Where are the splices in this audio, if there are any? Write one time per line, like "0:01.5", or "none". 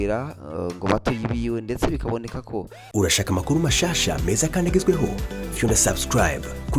0:02.8